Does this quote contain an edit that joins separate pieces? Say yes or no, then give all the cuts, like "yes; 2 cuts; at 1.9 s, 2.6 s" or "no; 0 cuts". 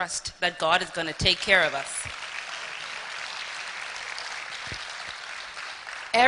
no; 0 cuts